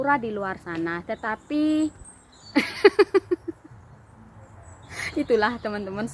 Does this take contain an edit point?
no; 0 cuts

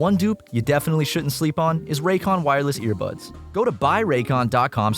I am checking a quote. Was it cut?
yes; 1 cut; at 3.4 s

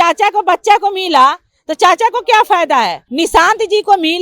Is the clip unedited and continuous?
no; 1 cut; at 3.0 s

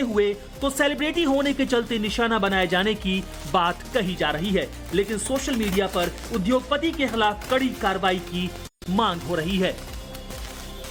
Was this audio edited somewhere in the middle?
no; 0 cuts

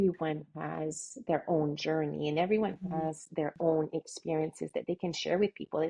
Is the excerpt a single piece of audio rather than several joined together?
yes; 0 cuts

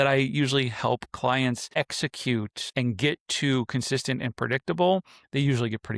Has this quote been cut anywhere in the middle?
yes; 2 cuts; at 1.8 s, 2.6 s

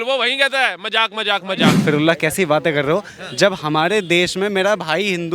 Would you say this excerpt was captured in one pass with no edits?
no; 1 cut; at 1.8 s

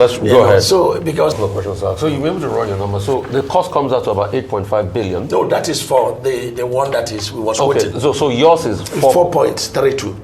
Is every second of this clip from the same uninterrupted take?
no; 1 cut; at 1.4 s

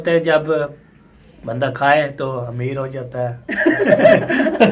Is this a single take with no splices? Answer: no; 1 cut; at 3.8 s

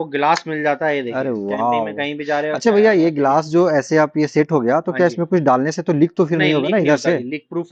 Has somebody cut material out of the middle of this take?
no; 0 cuts

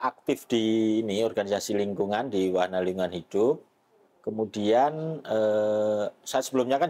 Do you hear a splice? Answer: no; 0 cuts

